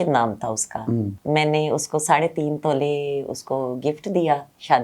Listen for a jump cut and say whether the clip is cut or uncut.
cut